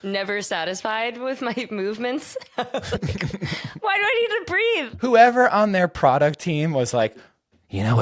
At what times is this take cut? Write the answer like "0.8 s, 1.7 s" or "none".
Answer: 5.0 s